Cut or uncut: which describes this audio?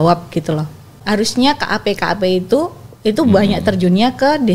cut